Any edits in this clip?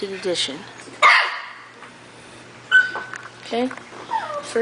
no; 0 cuts

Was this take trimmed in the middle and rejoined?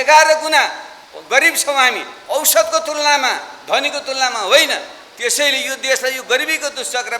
no; 0 cuts

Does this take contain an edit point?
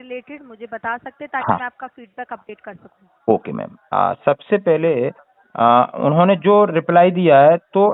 no; 0 cuts

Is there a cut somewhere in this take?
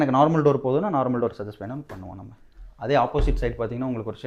no; 0 cuts

